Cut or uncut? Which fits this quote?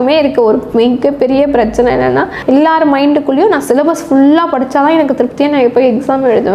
uncut